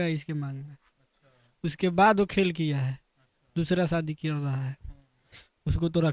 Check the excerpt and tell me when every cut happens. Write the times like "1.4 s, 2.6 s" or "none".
none